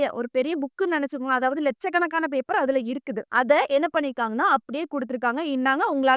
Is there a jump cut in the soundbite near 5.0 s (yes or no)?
no